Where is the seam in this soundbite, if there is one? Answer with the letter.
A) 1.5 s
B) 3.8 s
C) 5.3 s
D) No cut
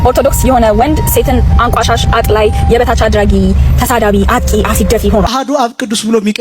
C